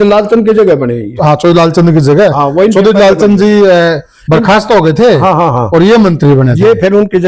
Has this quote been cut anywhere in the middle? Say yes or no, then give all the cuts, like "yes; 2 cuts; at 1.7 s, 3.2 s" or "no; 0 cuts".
no; 0 cuts